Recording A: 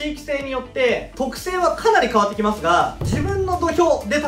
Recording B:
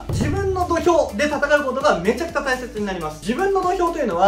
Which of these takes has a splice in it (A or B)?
B